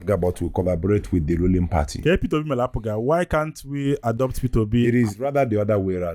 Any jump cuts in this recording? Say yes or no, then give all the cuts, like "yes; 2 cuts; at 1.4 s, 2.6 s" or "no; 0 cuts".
no; 0 cuts